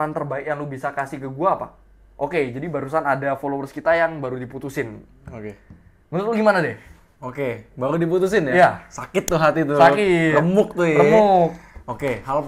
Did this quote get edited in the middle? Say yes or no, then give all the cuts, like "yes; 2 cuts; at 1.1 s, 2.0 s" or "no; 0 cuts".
no; 0 cuts